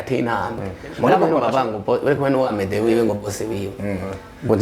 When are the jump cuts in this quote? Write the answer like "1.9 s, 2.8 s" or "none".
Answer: 1.3 s